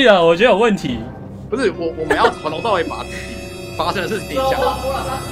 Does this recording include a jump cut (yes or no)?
no